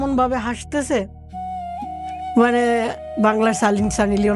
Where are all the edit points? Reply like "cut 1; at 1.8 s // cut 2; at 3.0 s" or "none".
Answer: none